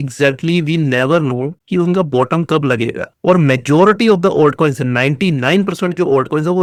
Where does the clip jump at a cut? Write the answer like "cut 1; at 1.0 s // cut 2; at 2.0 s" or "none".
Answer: none